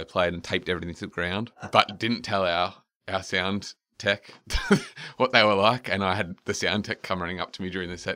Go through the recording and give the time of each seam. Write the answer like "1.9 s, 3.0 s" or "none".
1.7 s, 4.5 s